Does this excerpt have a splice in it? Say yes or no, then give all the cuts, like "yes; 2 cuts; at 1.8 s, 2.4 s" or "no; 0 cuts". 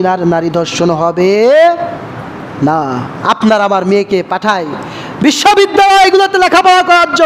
no; 0 cuts